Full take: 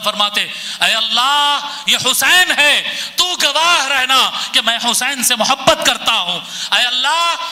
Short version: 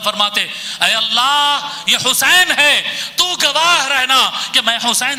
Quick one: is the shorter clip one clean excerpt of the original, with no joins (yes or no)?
yes